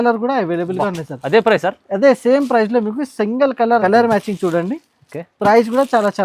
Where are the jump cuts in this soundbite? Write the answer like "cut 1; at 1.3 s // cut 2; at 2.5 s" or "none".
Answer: cut 1; at 3.8 s